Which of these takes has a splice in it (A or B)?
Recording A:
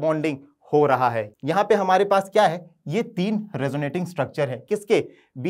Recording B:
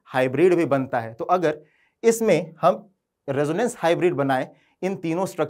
A